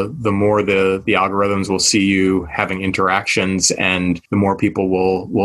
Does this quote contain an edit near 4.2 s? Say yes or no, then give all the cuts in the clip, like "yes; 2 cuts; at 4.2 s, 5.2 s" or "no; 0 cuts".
yes; 1 cut; at 4.2 s